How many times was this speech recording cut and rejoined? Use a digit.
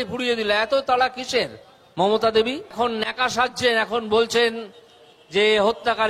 1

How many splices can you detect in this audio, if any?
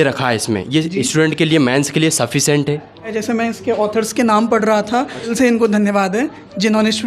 2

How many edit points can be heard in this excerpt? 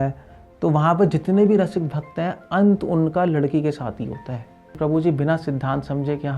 1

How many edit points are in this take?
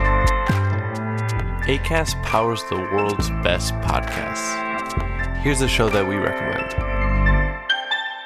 1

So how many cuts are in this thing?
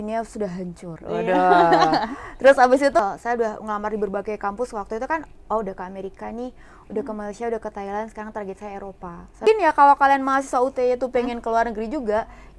2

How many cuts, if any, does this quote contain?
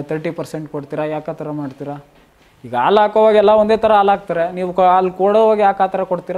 0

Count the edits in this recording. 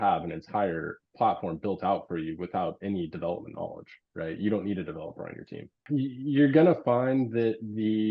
1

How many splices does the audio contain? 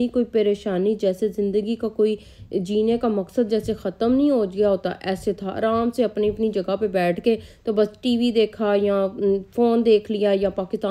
0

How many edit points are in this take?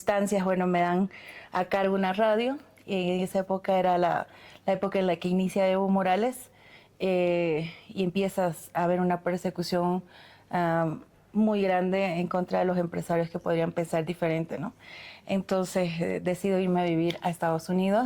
0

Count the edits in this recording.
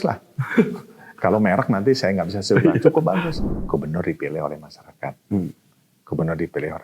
1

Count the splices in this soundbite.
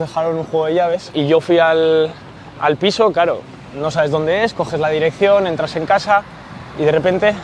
0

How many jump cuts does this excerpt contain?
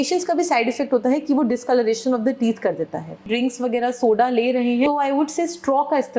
2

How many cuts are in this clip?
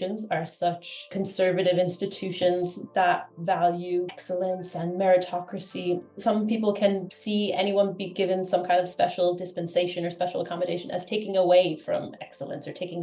1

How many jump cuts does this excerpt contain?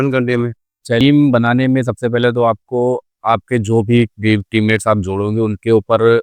1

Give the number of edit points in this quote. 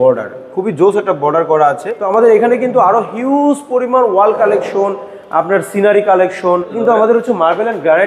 2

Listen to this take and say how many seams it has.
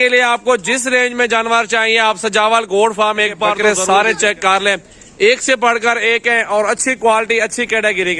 1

